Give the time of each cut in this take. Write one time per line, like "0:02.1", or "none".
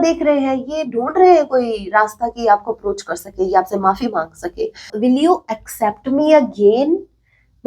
0:04.9